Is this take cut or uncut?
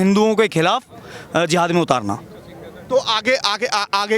uncut